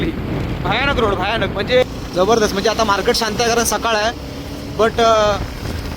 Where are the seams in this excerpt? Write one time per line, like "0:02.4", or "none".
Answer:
0:01.8